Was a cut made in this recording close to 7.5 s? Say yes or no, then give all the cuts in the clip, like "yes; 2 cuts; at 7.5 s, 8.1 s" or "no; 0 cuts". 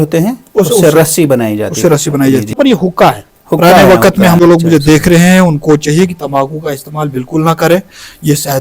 no; 2 cuts; at 2.5 s, 4.4 s